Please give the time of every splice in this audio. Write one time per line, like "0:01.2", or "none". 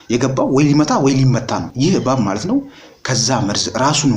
0:01.7

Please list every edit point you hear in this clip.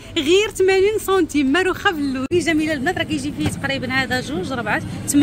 0:02.3

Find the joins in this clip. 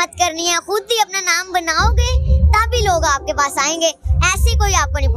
none

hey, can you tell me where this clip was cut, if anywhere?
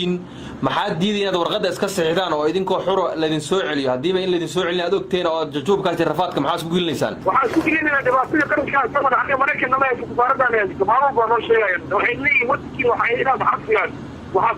0:01.5

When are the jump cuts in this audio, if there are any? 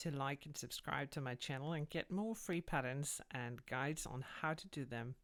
none

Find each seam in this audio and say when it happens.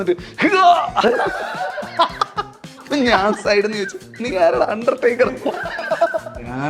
none

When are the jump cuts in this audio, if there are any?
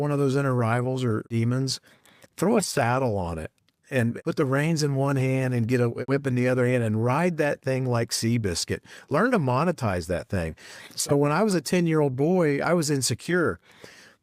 0:01.3
0:04.2
0:06.0

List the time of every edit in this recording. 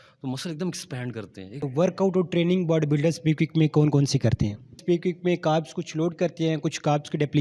0:01.7
0:04.8

